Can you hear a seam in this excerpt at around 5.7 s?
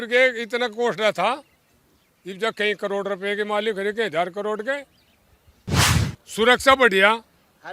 yes; 1 cut; at 5.7 s

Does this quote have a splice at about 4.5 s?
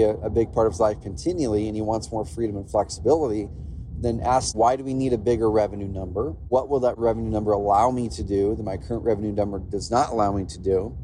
yes; 2 cuts; at 4.5 s, 6.9 s

